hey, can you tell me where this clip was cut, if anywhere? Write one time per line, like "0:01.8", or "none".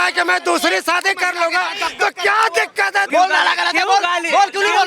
0:03.1